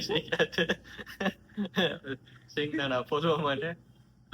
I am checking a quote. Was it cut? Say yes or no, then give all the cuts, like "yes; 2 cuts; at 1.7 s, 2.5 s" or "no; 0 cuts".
no; 0 cuts